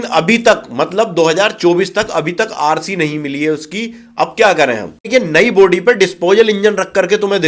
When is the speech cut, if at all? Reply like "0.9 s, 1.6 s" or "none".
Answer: 5.0 s